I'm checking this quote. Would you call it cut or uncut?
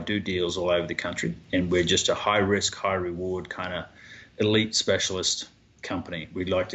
cut